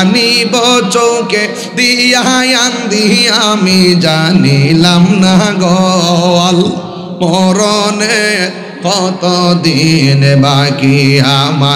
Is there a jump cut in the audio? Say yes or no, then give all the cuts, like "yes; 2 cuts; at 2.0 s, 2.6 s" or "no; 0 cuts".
no; 0 cuts